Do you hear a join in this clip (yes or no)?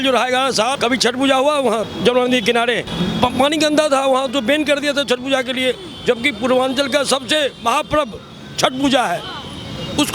yes